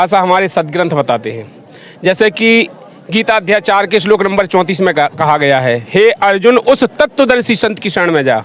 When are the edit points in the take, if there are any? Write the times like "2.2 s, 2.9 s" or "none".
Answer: none